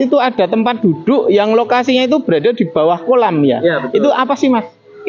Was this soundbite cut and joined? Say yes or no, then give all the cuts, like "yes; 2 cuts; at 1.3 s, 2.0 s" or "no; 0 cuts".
no; 0 cuts